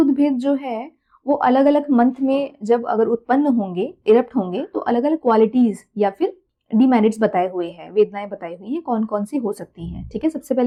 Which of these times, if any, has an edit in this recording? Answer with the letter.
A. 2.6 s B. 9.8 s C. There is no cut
C